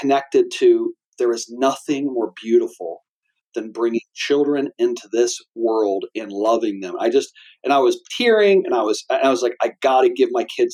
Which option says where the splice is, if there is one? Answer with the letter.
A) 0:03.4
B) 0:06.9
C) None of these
C